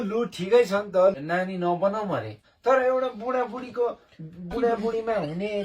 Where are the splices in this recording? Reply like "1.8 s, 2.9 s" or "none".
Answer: 1.2 s, 2.5 s